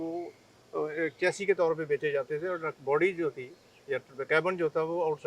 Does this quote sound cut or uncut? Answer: uncut